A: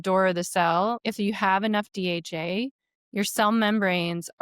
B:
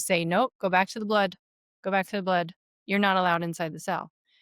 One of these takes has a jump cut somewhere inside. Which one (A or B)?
A